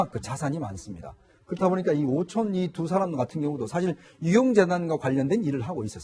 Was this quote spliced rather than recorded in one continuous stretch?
no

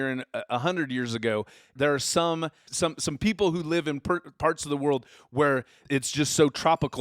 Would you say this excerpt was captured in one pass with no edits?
no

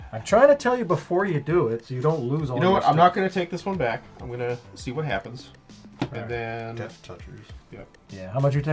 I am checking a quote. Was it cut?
no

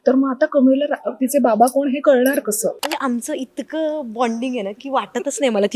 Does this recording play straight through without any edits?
no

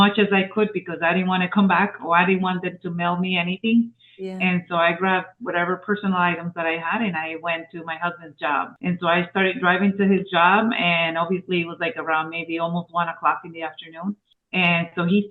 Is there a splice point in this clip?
no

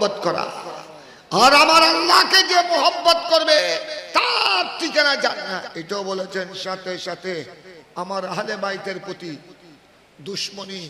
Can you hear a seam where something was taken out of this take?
yes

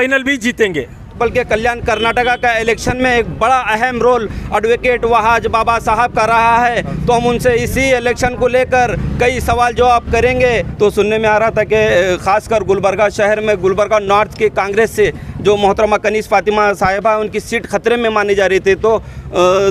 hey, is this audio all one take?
no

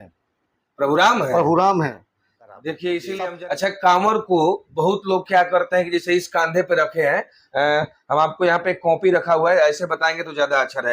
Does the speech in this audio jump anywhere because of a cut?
yes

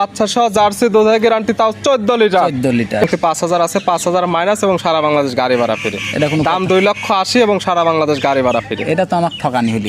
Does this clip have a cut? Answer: yes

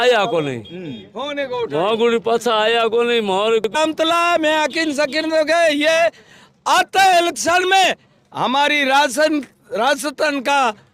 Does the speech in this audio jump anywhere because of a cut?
yes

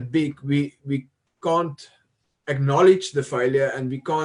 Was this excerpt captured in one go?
yes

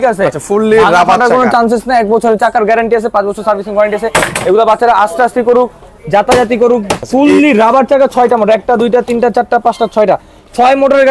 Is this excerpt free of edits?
no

